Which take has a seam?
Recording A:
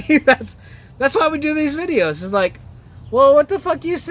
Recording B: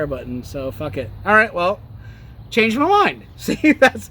B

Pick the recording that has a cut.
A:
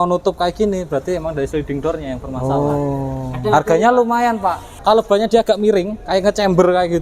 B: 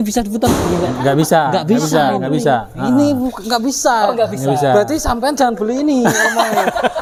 A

